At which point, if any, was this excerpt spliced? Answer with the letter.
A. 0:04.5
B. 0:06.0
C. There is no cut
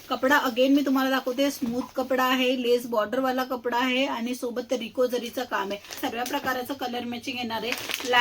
B